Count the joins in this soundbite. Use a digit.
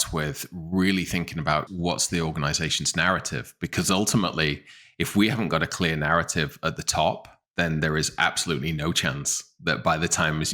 1